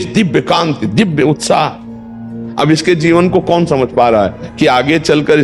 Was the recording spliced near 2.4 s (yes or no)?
yes